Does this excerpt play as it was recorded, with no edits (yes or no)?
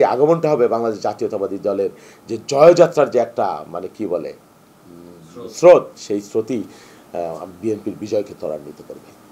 yes